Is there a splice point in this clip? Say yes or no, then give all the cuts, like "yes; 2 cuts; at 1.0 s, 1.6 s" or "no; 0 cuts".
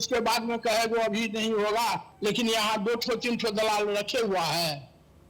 yes; 1 cut; at 2.1 s